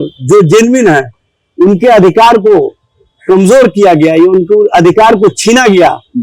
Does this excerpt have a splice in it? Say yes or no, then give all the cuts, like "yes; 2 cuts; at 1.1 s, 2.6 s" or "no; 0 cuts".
no; 0 cuts